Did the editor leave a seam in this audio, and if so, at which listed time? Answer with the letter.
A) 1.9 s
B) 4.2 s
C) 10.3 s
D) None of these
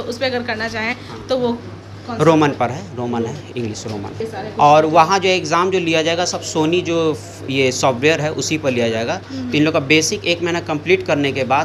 B